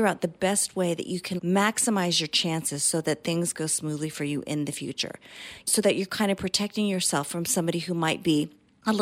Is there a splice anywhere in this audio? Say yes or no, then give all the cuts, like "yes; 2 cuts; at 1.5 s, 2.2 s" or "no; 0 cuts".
no; 0 cuts